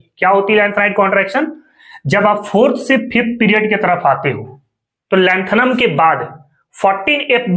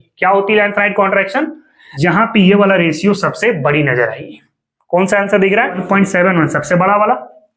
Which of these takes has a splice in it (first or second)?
second